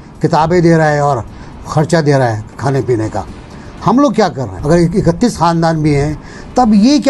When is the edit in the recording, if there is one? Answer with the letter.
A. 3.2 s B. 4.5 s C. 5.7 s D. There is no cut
B